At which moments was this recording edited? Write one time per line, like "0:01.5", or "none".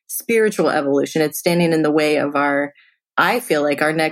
0:03.1